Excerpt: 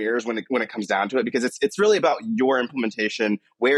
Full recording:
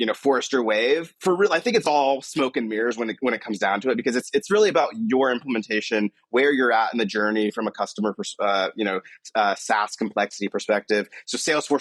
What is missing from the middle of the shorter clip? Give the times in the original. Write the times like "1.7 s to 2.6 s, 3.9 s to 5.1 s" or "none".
none